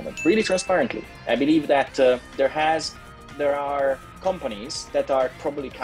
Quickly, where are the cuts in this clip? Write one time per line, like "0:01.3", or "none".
none